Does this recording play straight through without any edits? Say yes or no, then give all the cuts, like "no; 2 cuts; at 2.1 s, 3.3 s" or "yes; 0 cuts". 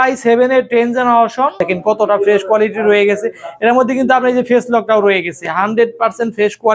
no; 1 cut; at 1.6 s